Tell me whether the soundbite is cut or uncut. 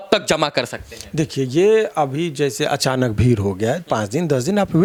uncut